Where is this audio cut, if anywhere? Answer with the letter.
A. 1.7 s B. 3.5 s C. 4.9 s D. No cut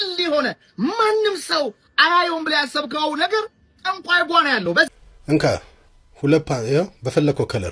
C